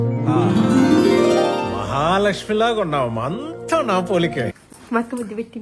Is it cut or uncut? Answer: cut